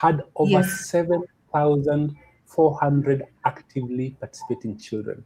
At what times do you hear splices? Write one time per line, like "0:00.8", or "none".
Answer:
none